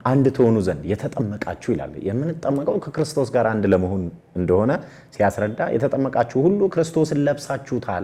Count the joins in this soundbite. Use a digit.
0